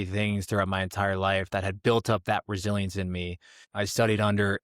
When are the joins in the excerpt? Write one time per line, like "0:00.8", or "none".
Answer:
0:03.7